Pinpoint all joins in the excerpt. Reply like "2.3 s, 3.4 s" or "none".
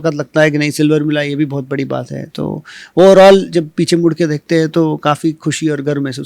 none